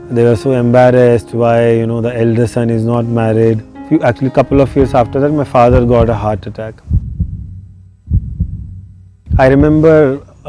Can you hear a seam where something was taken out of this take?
yes; 2 cuts; at 6.8 s, 9.2 s

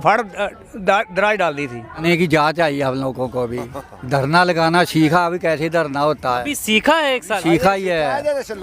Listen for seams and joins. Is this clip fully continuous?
no; 1 cut; at 2.0 s

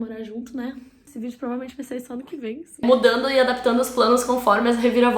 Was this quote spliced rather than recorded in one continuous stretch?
yes; 2 cuts; at 1.1 s, 2.8 s

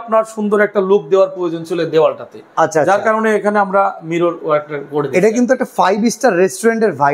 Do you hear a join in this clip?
no; 0 cuts

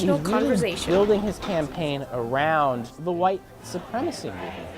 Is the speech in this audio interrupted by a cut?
yes; 1 cut; at 2.9 s

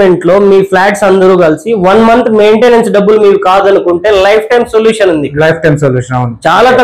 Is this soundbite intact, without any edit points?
yes; 0 cuts

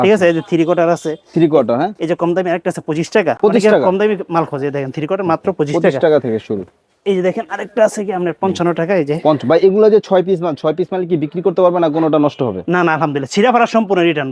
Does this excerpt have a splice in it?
no; 0 cuts

